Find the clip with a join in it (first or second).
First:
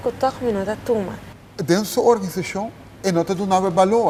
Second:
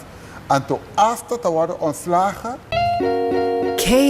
second